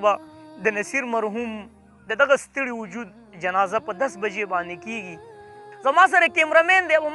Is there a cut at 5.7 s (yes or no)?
yes